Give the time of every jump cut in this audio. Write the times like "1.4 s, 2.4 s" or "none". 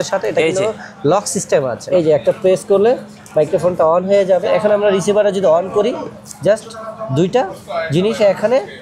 1.8 s, 4.4 s

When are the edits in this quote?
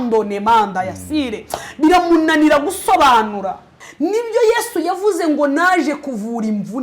3.8 s

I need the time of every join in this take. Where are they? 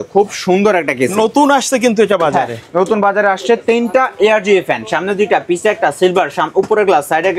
none

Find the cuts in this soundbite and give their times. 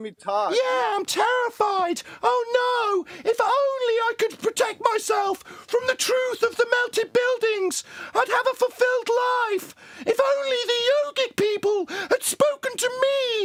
none

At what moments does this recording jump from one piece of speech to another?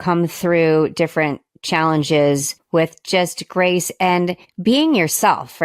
2.6 s, 4.5 s

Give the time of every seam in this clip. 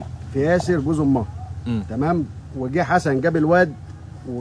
2.4 s

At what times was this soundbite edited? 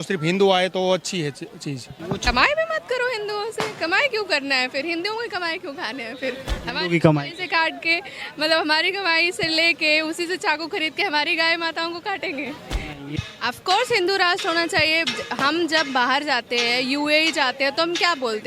2.3 s, 13.0 s

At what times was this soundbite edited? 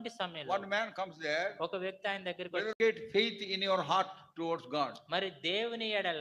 2.8 s

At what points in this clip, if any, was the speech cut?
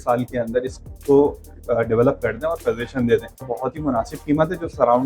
3.5 s

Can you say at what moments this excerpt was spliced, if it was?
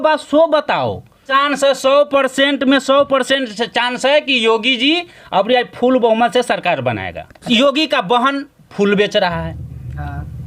1.2 s, 7.5 s

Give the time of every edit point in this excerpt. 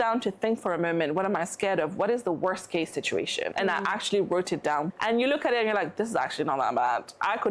3.5 s, 4.9 s

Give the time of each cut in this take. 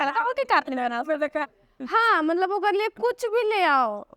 1.5 s

